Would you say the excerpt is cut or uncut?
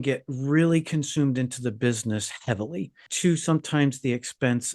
cut